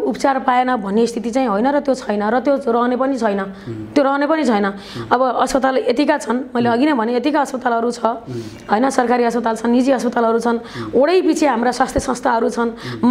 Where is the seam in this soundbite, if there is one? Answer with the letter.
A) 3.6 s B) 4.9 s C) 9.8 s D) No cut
D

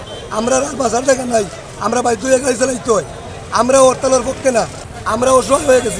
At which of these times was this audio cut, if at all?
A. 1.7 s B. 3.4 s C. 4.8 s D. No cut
C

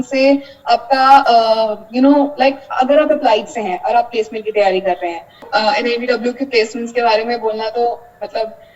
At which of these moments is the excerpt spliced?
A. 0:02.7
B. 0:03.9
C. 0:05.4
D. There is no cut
C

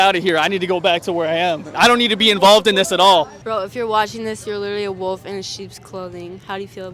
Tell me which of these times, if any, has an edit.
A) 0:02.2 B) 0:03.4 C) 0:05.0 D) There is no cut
B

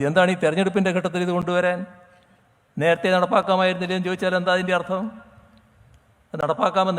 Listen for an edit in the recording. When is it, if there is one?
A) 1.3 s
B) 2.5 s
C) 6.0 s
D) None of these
D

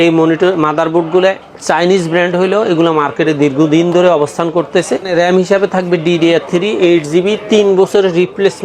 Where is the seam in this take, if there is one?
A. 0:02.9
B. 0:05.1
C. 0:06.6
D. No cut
B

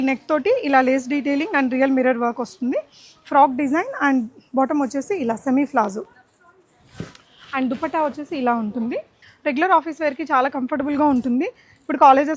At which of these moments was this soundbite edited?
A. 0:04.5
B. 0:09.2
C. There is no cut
B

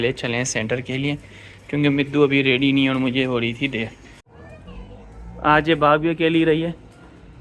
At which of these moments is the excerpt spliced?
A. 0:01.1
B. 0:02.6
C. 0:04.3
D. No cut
C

